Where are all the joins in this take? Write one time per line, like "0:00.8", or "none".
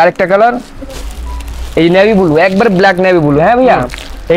none